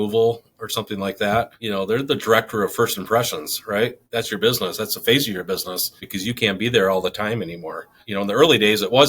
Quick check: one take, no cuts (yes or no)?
no